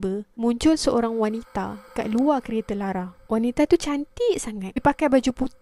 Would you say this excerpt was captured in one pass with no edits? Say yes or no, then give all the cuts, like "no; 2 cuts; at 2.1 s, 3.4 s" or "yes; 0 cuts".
no; 1 cut; at 4.7 s